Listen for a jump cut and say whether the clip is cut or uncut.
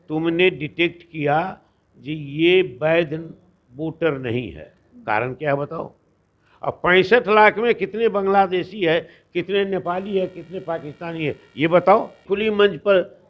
cut